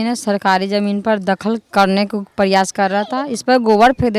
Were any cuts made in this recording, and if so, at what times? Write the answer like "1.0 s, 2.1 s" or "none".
none